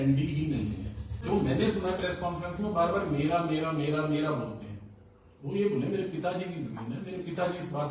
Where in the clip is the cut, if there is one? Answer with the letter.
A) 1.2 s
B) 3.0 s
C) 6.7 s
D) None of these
A